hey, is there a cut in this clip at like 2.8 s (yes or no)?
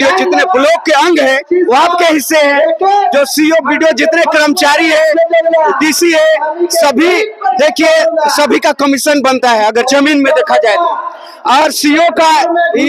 no